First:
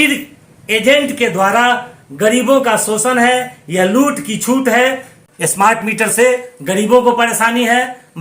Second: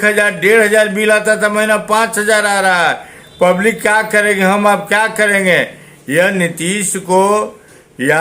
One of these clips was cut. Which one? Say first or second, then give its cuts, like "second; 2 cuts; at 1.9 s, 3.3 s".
first; 1 cut; at 5.1 s